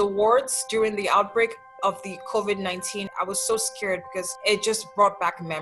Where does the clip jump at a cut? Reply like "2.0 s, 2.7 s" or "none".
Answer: 3.1 s, 4.3 s